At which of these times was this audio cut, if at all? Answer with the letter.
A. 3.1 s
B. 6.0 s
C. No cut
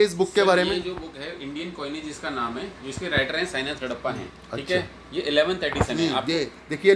C